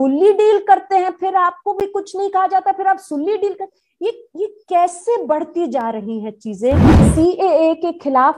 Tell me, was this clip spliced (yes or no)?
yes